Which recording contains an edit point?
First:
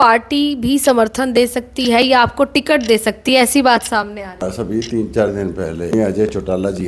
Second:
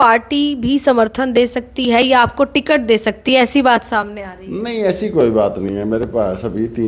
first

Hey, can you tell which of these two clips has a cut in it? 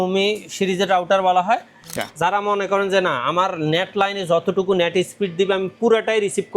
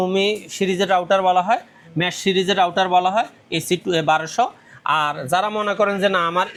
first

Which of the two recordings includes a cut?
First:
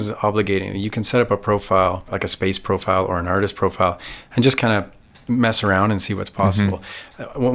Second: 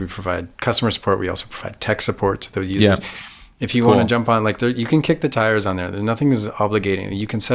first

